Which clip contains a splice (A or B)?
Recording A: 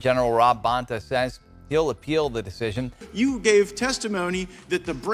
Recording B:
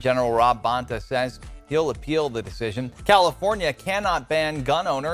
A